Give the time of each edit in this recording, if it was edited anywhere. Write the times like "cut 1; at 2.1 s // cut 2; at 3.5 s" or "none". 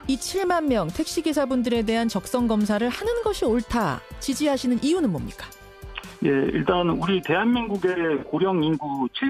cut 1; at 6.3 s